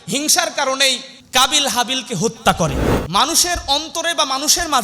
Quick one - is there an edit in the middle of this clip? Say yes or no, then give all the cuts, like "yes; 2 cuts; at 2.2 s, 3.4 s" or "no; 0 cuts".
yes; 2 cuts; at 1.1 s, 2.9 s